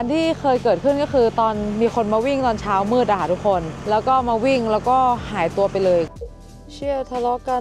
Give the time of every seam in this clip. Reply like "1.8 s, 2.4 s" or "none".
6.1 s